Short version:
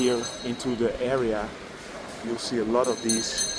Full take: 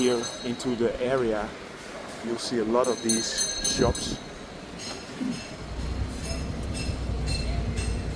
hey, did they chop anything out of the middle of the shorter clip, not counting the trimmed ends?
no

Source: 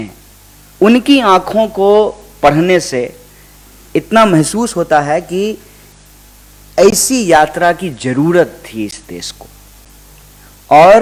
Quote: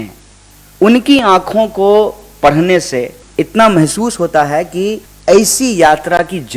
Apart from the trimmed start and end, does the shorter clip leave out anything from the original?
yes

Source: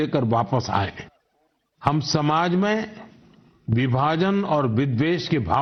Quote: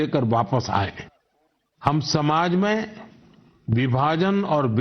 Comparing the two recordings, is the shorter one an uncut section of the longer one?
yes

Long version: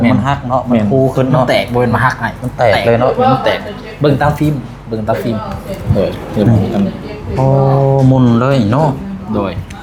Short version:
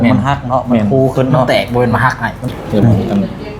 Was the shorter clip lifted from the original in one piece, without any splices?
no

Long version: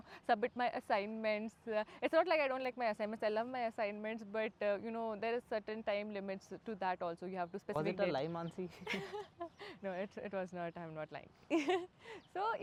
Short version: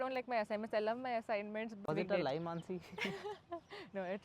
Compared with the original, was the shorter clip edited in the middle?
yes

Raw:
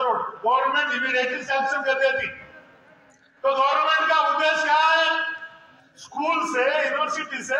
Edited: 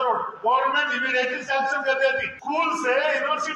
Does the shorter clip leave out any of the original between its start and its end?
yes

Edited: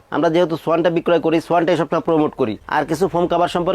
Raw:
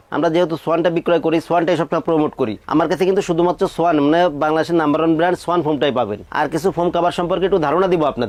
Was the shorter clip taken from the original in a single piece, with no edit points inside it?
no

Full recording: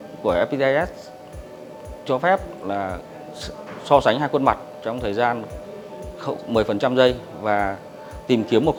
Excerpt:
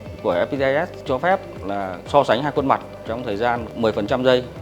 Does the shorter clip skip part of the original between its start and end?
yes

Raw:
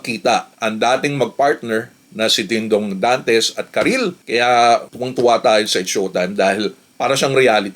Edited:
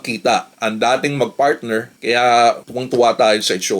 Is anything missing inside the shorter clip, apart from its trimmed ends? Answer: yes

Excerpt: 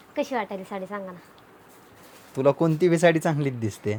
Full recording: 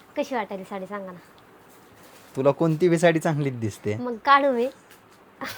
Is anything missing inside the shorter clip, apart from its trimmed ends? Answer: no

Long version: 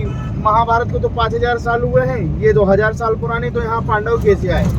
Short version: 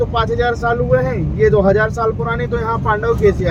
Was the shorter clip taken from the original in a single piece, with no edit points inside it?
yes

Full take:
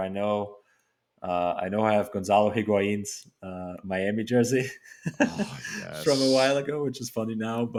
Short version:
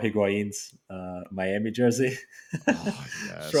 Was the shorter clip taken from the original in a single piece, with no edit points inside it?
yes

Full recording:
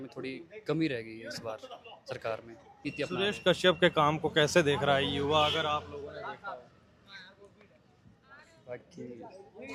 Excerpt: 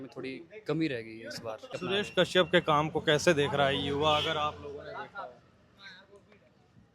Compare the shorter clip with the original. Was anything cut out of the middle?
yes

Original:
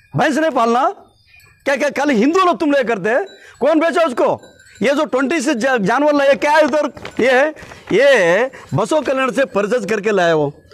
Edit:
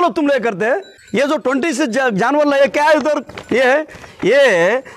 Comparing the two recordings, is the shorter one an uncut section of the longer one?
no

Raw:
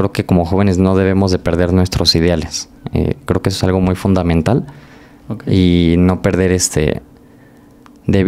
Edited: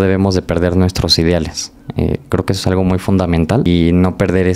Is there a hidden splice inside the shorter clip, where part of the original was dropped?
yes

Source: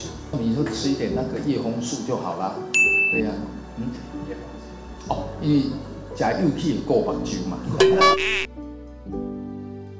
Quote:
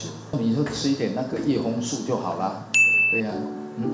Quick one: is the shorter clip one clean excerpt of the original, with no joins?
yes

